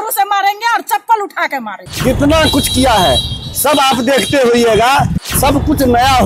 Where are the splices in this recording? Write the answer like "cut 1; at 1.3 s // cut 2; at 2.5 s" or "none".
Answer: cut 1; at 1.8 s // cut 2; at 5.2 s

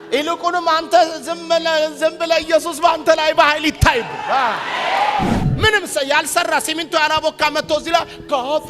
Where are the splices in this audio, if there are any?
cut 1; at 5.4 s

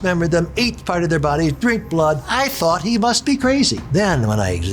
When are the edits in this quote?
cut 1; at 2.3 s // cut 2; at 3.8 s

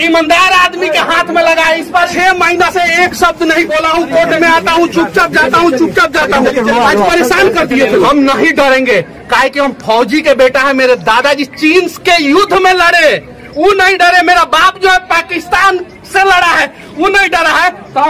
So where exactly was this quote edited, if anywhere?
cut 1; at 2.1 s // cut 2; at 8.1 s

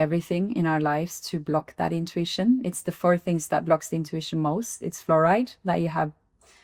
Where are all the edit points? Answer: none

